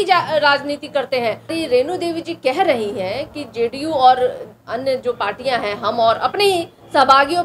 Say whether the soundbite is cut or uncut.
cut